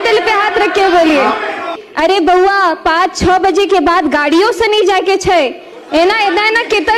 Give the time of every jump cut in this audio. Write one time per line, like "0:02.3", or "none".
0:01.8